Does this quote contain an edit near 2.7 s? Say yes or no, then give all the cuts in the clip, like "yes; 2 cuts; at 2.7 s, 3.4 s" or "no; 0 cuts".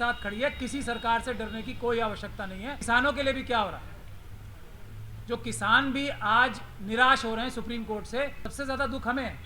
yes; 2 cuts; at 2.7 s, 8.4 s